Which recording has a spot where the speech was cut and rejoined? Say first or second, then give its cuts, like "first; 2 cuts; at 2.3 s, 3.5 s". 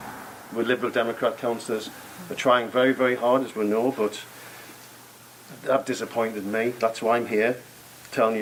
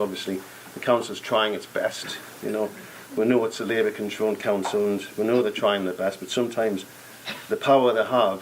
second; 1 cut; at 1.3 s